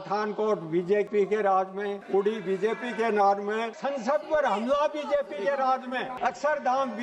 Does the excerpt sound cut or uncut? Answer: cut